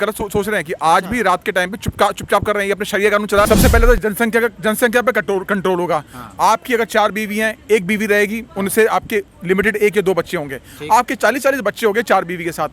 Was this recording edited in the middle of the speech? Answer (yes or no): yes